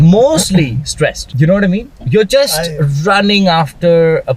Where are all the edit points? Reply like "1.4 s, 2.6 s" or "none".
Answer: 1.2 s